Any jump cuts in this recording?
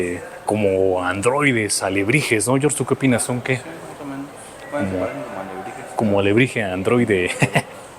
no; 0 cuts

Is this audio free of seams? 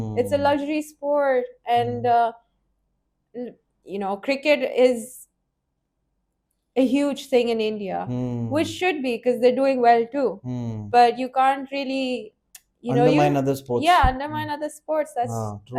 yes; 0 cuts

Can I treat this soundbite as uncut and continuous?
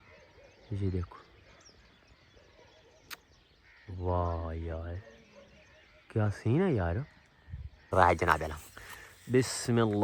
no; 1 cut; at 7.9 s

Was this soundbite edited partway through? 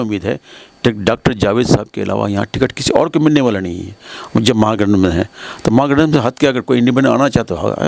no; 0 cuts

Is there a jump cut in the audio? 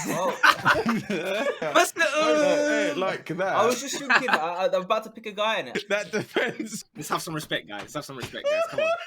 yes; 3 cuts; at 1.6 s, 5.7 s, 6.8 s

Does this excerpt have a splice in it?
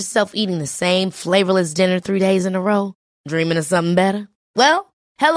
no; 0 cuts

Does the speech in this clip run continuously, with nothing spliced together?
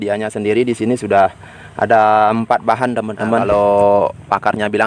no; 1 cut; at 3.4 s

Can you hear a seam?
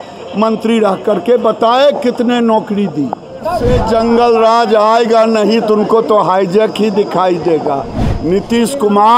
yes; 1 cut; at 3.6 s

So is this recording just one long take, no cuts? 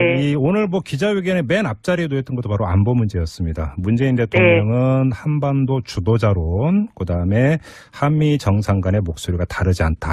yes; 0 cuts

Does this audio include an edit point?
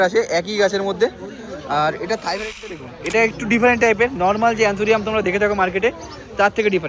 yes; 1 cut; at 2.9 s

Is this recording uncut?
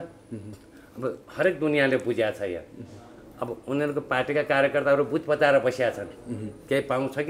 yes; 0 cuts

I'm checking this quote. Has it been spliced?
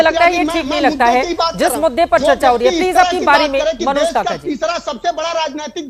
no; 0 cuts

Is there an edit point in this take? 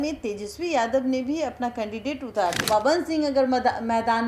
yes; 1 cut; at 2.6 s

